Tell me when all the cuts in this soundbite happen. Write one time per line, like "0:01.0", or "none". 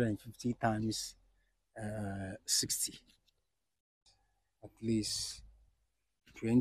0:03.9